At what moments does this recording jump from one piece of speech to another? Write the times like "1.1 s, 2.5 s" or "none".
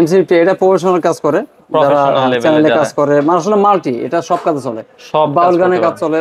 none